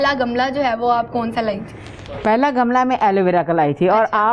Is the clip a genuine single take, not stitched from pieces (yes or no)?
yes